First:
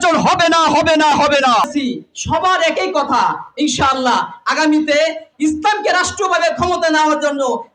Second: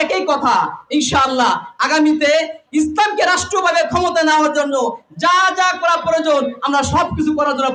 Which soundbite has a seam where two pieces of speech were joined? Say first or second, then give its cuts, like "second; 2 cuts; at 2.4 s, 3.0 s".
first; 1 cut; at 1.6 s